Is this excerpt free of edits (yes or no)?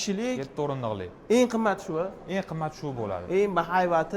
yes